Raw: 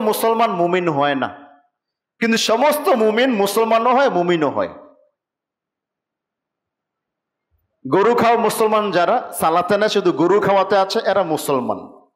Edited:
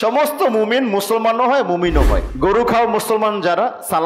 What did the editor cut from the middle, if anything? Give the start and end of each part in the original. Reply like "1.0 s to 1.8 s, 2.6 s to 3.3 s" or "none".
4.7 s to 7.8 s